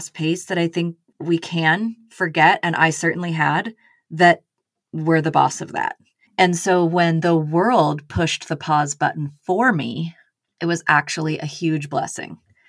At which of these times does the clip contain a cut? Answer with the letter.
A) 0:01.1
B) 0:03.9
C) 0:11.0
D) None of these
A